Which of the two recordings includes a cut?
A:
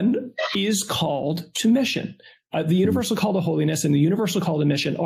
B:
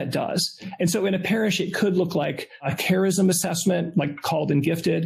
B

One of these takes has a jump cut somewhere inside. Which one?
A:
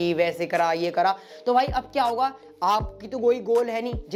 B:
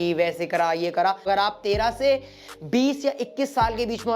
B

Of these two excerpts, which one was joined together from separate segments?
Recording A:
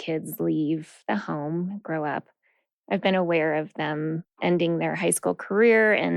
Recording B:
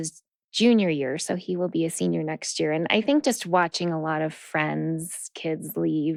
A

